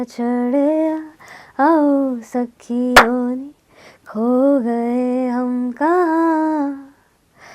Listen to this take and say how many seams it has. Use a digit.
0